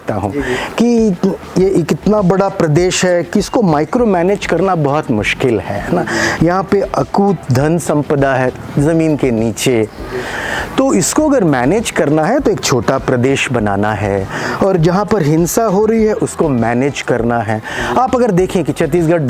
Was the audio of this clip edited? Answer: no; 0 cuts

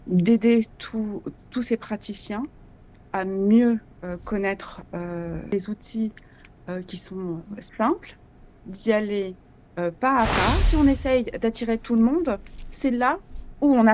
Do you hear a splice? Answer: yes; 2 cuts; at 5.5 s, 10.7 s

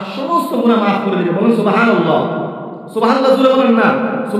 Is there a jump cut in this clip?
yes; 1 cut; at 1.4 s

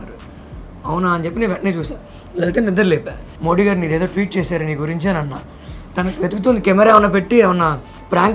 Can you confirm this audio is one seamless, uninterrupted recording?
no; 2 cuts; at 3.2 s, 5.7 s

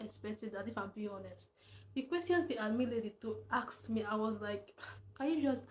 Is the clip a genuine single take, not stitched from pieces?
yes; 0 cuts

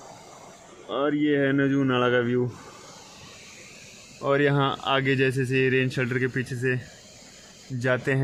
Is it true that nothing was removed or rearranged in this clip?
yes; 0 cuts

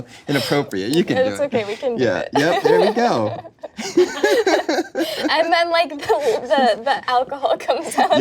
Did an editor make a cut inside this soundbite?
no; 0 cuts

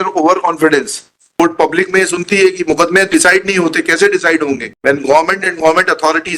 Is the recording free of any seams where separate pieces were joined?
no; 1 cut; at 1.2 s

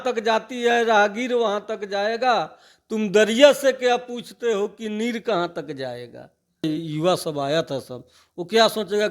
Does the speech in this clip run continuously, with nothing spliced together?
no; 1 cut; at 6.6 s

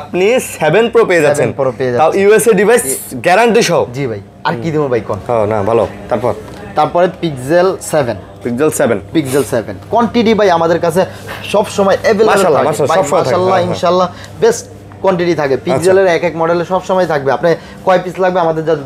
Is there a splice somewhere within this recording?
no; 0 cuts

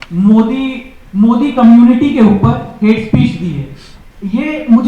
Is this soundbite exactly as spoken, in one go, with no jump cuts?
yes; 0 cuts

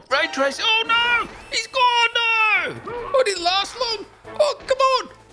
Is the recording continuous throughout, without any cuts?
yes; 0 cuts

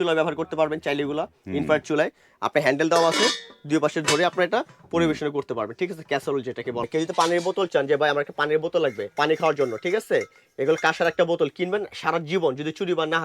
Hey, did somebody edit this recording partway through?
yes; 2 cuts; at 6.8 s, 9.1 s

